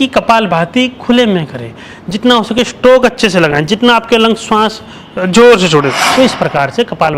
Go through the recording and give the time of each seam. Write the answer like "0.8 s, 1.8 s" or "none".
6.0 s